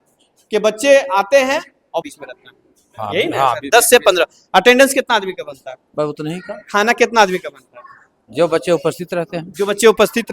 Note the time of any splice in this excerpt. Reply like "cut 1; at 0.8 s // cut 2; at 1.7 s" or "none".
cut 1; at 2.0 s